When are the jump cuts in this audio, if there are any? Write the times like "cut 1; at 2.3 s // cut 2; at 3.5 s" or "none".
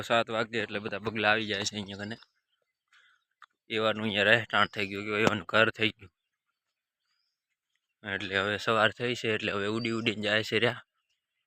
cut 1; at 1.5 s

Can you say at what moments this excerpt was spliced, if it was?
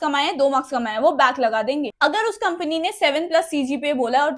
cut 1; at 1.9 s

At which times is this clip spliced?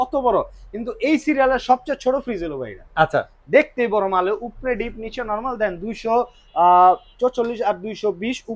none

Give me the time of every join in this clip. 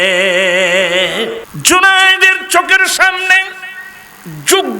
cut 1; at 1.5 s

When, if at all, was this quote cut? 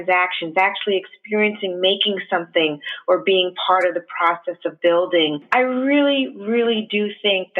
cut 1; at 5.4 s

